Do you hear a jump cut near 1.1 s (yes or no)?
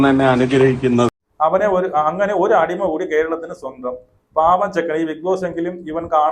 yes